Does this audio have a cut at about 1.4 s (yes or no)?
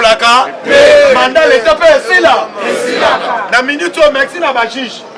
no